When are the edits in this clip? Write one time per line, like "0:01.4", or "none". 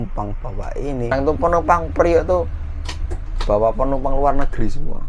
0:01.1